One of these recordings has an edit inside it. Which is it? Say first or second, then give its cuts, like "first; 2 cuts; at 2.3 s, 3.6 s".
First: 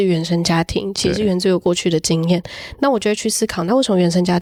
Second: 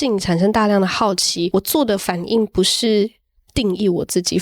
second; 1 cut; at 1.5 s